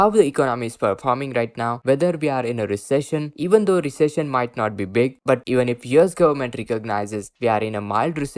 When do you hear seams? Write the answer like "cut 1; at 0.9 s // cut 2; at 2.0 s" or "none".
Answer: none